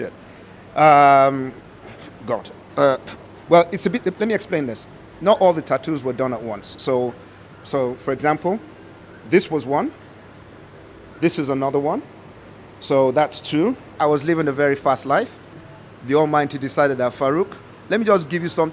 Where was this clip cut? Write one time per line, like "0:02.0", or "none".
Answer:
0:13.9